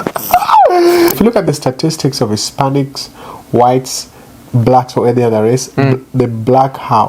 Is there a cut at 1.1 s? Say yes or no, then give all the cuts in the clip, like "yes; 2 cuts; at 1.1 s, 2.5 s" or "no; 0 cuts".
yes; 1 cut; at 1.1 s